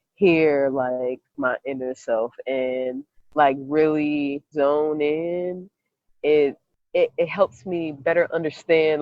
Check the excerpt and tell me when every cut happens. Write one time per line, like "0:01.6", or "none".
0:01.4
0:04.5
0:06.7